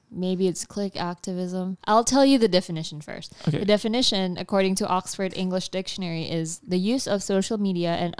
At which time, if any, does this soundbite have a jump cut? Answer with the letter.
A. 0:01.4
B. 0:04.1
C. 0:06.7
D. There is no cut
D